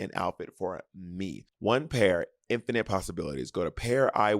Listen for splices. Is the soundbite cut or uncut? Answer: cut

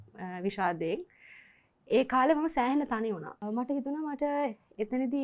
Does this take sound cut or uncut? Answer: cut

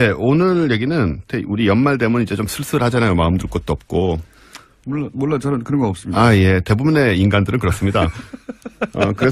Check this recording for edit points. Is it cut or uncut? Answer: uncut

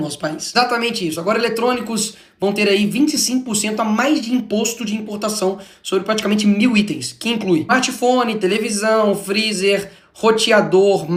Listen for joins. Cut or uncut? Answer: uncut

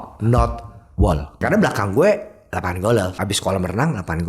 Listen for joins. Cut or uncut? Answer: cut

